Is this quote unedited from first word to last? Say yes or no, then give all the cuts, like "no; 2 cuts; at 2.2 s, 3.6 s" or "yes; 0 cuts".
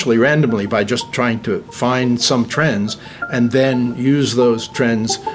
no; 1 cut; at 1.7 s